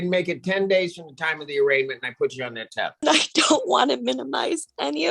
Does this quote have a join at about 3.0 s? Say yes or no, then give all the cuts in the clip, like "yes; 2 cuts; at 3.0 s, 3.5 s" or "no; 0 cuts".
yes; 1 cut; at 3.0 s